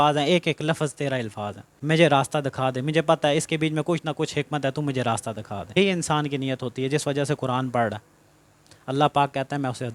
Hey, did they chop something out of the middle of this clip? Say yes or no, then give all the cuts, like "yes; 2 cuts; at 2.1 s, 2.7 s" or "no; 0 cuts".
yes; 2 cuts; at 1.7 s, 5.8 s